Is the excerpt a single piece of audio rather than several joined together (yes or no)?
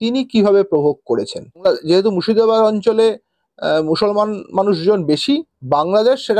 no